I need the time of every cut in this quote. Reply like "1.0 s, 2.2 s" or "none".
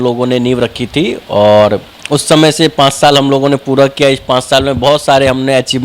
none